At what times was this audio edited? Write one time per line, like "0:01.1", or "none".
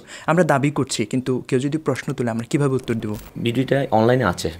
0:03.3